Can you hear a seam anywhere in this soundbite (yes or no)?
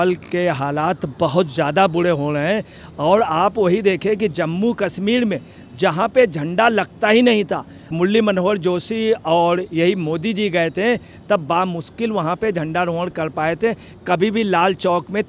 no